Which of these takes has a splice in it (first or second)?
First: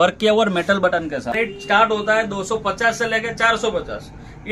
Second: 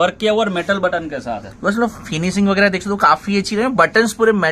first